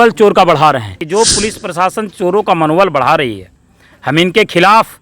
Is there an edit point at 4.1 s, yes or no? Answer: no